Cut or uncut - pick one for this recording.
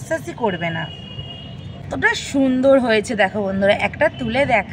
cut